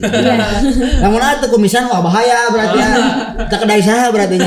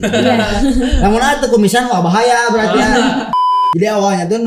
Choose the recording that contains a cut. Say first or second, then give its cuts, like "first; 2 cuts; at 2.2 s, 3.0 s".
second; 1 cut; at 3.4 s